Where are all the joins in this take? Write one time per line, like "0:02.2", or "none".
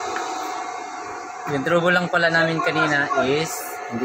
none